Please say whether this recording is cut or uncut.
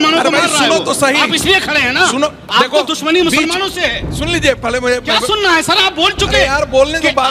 uncut